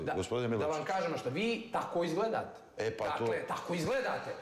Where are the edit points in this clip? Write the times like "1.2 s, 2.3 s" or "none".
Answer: none